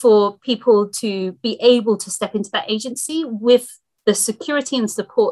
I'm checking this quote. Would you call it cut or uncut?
uncut